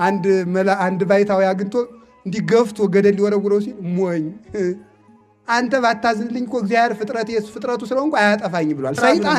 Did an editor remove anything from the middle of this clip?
no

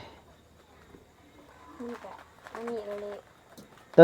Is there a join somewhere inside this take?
no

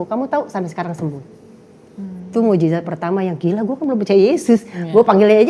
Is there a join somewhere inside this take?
no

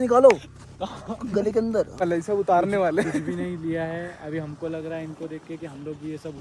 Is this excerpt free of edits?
no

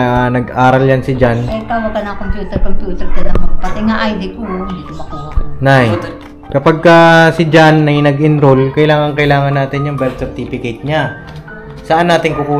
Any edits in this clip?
no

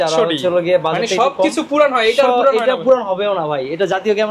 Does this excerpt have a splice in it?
no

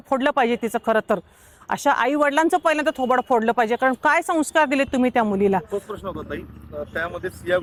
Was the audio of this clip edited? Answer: no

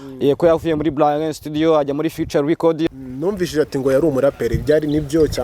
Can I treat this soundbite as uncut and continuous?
no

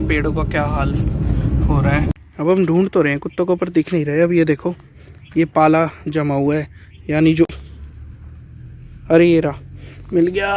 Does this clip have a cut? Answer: yes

